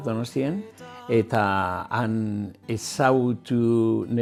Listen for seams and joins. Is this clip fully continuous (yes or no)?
yes